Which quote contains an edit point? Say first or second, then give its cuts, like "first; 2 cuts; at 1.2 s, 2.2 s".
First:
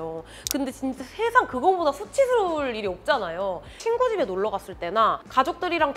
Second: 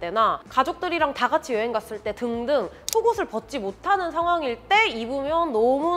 first; 1 cut; at 3.8 s